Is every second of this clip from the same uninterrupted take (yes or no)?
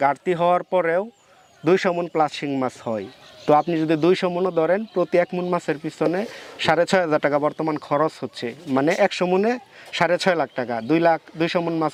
yes